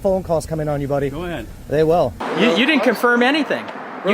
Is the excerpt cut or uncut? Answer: cut